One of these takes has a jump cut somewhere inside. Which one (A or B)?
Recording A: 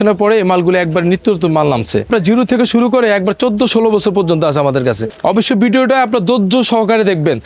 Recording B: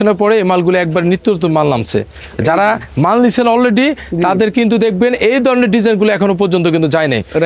A